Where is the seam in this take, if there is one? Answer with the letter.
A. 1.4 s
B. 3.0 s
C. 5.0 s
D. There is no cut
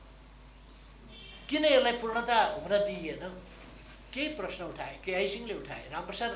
D